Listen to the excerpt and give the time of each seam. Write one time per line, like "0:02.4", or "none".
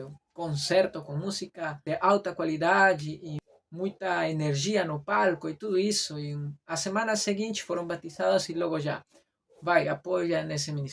0:01.7
0:03.4